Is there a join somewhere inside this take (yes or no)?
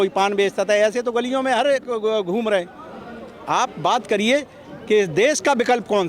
no